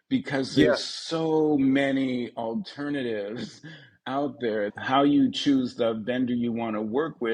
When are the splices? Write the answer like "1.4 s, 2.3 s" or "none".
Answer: 4.7 s

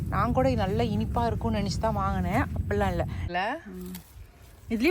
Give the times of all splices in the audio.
3.2 s

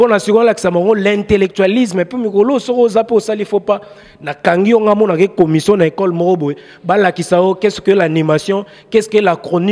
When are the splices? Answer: none

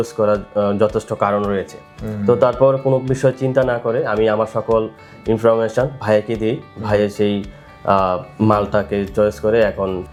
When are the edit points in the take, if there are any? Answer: none

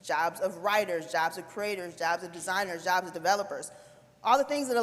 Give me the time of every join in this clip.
none

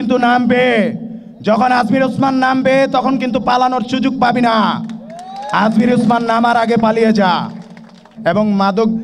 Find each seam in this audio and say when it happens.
8.1 s

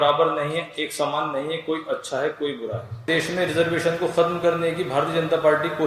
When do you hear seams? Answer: 3.1 s

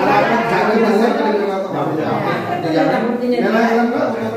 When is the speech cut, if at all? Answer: none

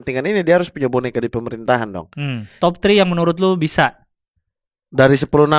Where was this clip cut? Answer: 2.5 s

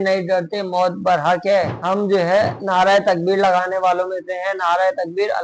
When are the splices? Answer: none

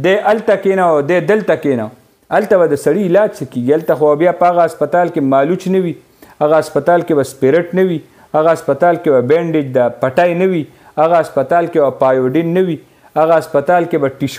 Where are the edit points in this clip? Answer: none

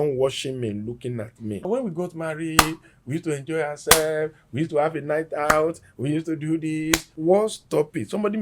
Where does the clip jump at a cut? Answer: 1.7 s, 7.1 s

